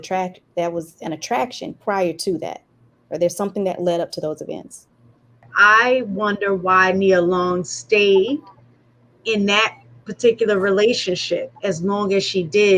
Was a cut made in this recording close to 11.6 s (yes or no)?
no